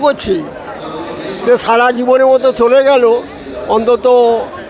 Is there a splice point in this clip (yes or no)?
no